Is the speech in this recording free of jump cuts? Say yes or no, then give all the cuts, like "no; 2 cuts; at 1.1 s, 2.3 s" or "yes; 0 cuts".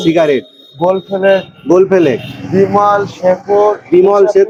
yes; 0 cuts